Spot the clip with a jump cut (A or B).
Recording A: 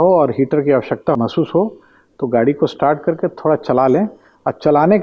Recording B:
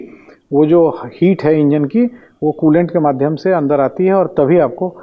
A